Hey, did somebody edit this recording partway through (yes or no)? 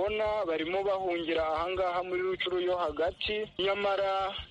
yes